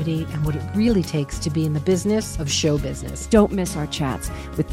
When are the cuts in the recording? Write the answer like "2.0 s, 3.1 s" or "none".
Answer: none